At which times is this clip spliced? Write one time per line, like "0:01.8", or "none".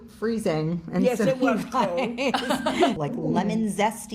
0:02.9